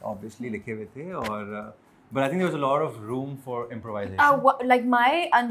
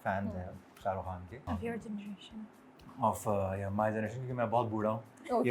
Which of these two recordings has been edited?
second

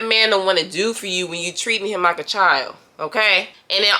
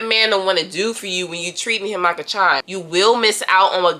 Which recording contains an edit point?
second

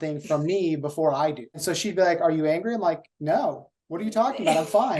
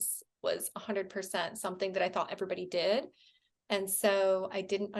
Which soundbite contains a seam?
first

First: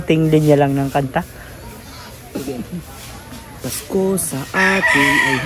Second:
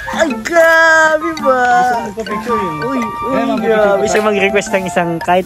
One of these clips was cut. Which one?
second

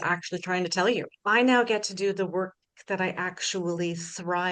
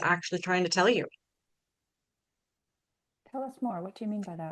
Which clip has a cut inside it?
first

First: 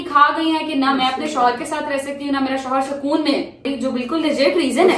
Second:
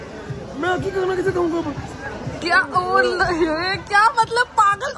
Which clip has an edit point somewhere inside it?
first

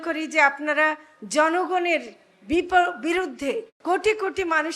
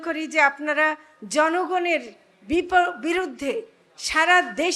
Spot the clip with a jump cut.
first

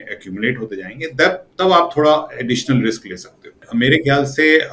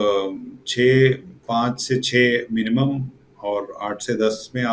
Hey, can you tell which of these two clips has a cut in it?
first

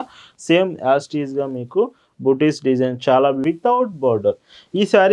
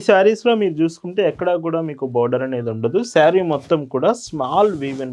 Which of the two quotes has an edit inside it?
first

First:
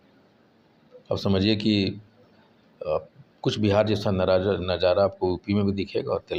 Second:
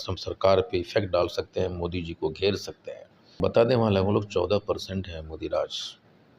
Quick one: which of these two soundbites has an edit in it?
second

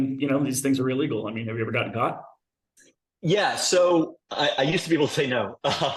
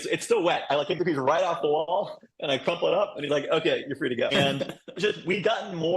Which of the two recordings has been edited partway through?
second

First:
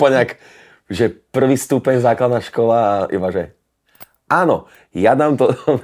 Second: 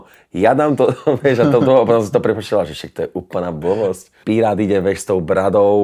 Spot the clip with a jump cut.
second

